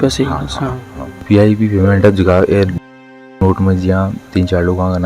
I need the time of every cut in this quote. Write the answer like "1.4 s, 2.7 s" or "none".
1.2 s